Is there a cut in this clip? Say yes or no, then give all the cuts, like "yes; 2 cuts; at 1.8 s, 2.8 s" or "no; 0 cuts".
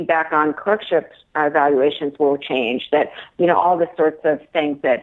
no; 0 cuts